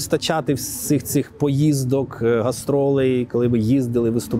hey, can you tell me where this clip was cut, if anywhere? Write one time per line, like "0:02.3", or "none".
none